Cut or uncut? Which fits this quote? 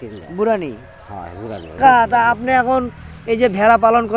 cut